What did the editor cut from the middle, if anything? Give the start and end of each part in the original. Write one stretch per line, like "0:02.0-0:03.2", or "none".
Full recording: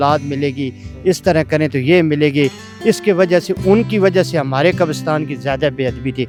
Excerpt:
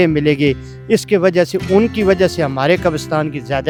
none